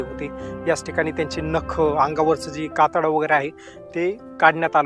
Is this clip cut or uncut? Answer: uncut